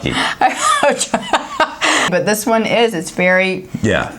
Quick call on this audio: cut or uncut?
cut